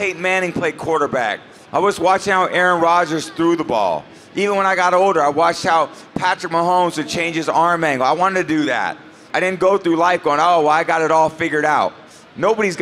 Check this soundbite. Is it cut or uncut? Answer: cut